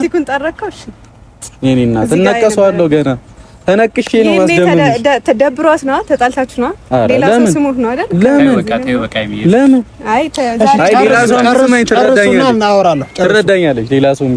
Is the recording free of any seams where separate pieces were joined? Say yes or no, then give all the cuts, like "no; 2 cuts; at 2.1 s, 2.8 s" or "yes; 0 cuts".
yes; 0 cuts